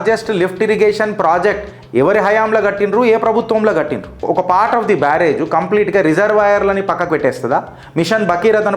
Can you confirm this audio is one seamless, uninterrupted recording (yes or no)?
no